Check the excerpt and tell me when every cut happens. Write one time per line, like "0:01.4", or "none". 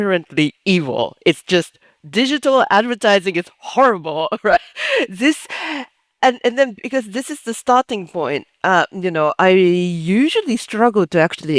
none